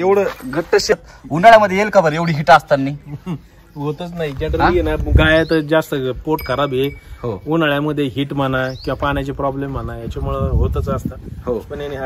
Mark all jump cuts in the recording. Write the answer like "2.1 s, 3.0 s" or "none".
1.0 s